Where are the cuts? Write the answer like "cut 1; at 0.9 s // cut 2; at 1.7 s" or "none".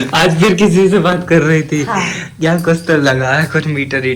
none